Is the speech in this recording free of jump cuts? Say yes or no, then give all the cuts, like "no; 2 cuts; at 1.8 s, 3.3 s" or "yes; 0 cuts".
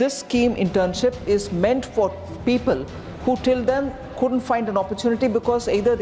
yes; 0 cuts